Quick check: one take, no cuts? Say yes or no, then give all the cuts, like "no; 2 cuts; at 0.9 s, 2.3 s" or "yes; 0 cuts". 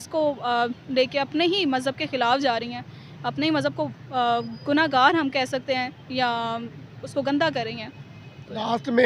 yes; 0 cuts